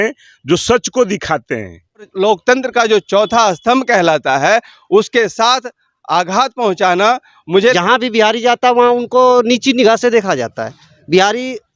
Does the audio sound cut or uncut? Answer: cut